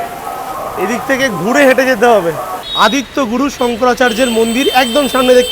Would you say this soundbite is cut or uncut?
cut